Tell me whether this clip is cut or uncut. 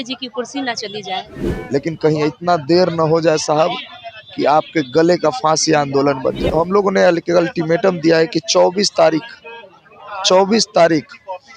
cut